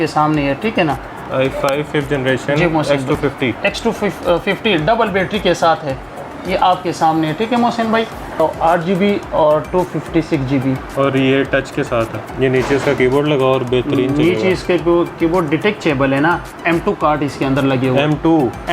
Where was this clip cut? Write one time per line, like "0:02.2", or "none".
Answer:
0:01.2
0:08.4
0:12.2
0:16.6